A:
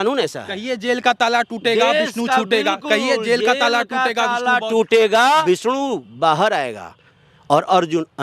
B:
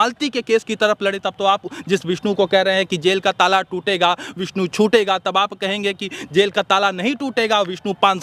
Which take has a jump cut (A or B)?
A